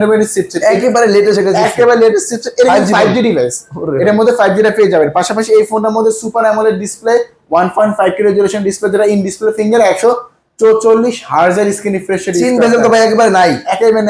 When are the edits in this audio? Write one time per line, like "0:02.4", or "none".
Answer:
none